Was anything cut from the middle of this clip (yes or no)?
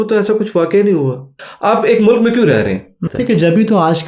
yes